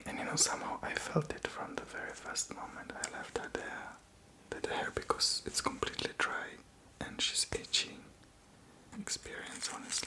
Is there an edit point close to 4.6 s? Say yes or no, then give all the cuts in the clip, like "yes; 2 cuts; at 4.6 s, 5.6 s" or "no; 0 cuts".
yes; 2 cuts; at 4.6 s, 8.9 s